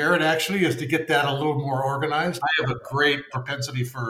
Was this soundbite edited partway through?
yes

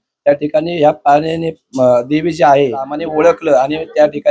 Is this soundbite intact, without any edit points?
no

